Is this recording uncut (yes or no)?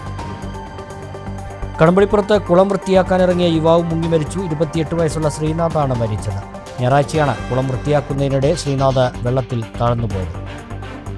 yes